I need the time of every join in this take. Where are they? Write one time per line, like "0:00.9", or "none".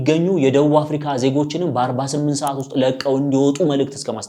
none